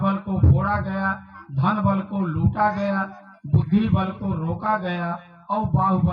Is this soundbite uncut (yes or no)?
yes